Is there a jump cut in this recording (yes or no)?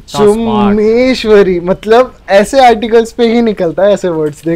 no